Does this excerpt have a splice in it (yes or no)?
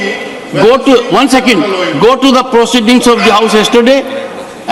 no